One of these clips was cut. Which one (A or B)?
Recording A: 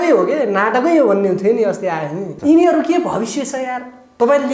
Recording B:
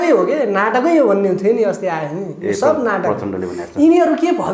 A